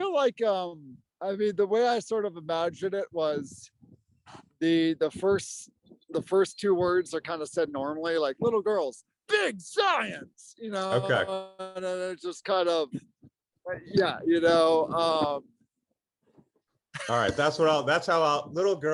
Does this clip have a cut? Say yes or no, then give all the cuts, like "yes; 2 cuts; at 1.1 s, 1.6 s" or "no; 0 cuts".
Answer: no; 0 cuts